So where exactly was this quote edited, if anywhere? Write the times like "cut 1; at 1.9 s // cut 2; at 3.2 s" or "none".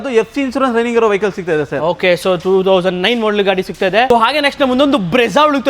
none